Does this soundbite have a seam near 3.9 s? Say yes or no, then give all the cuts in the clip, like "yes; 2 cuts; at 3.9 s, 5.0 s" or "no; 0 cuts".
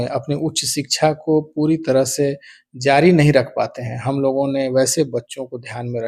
no; 0 cuts